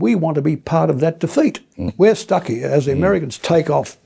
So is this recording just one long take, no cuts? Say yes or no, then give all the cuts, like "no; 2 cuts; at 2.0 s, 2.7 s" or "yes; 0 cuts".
no; 1 cut; at 1.8 s